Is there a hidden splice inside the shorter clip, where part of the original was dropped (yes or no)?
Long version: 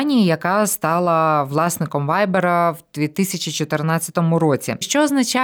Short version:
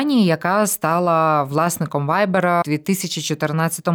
yes